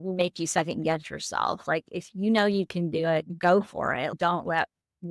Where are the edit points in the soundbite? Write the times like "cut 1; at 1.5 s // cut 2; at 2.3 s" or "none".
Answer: cut 1; at 3.3 s // cut 2; at 4.1 s